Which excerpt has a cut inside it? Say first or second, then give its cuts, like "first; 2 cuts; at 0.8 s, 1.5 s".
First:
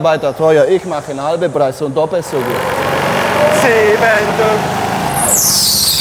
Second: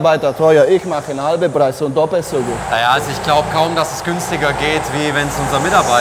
first; 1 cut; at 2.6 s